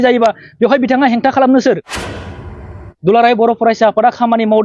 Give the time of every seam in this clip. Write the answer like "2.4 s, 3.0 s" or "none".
2.3 s